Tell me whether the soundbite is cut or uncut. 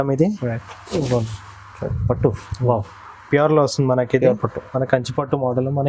uncut